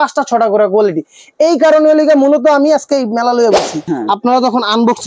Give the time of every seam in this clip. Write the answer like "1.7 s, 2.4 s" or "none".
3.8 s